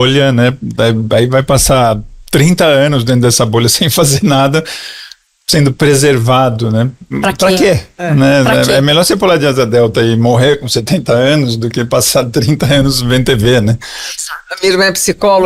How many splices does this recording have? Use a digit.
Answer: 0